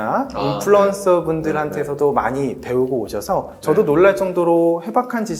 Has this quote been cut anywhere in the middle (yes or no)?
no